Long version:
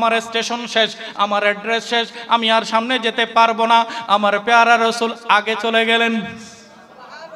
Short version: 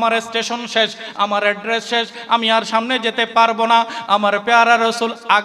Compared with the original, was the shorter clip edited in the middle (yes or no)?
no